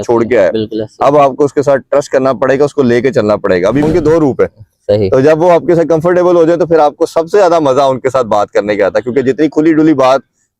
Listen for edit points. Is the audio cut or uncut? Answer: cut